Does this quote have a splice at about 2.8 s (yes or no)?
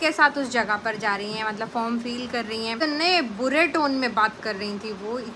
yes